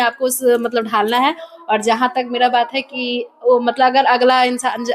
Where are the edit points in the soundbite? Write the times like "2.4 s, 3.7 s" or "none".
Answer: none